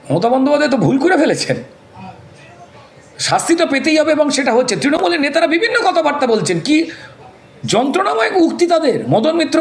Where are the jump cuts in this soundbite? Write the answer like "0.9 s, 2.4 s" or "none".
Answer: none